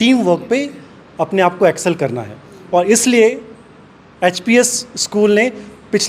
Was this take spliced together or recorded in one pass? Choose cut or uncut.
uncut